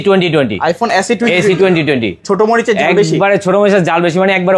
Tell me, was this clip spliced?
no; 0 cuts

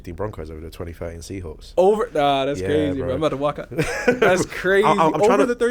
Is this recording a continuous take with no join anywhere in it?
yes; 0 cuts

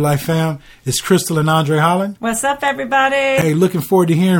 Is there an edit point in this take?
no; 0 cuts

